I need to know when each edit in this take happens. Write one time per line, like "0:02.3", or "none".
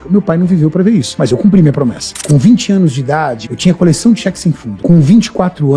0:01.1
0:02.1
0:03.4
0:04.7